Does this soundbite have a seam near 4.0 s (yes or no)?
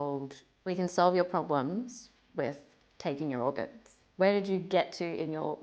yes